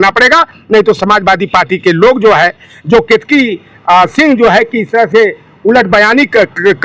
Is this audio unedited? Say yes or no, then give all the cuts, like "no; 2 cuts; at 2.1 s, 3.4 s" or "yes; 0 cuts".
yes; 0 cuts